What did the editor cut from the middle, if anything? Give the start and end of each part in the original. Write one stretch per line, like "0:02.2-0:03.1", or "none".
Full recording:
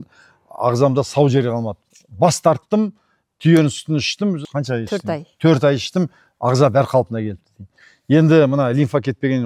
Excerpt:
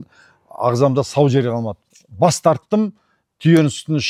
none